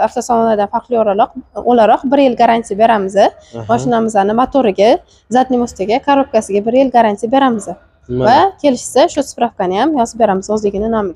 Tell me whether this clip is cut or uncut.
uncut